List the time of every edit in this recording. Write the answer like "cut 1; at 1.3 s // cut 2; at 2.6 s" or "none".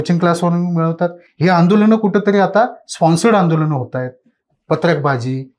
none